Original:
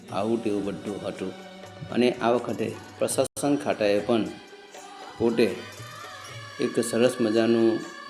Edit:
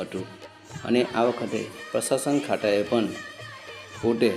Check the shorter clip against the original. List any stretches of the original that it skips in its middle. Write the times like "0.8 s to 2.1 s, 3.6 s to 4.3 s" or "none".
3.3 s to 3.4 s